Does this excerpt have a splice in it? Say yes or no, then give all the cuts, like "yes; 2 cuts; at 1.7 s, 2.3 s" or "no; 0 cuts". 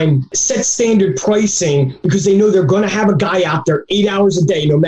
no; 0 cuts